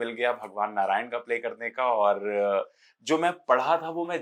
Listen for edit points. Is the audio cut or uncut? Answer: uncut